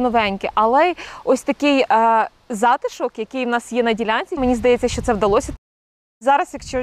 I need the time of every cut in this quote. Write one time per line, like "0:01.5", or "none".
0:04.4
0:05.8